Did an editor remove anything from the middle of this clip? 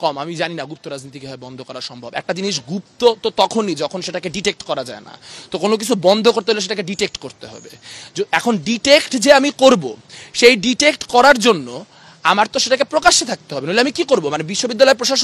no; 0 cuts

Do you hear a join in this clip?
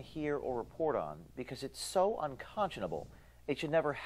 yes; 1 cut; at 2.1 s

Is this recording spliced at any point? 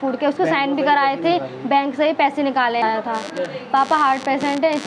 yes; 1 cut; at 2.8 s

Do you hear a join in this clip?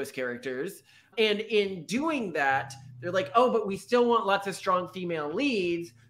no; 0 cuts

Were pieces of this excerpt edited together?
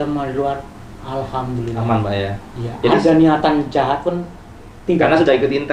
no; 0 cuts

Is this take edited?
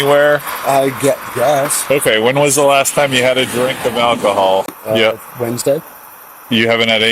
yes; 2 cuts; at 1.8 s, 4.8 s

